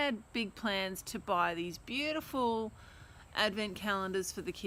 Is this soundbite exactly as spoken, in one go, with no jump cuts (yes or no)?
yes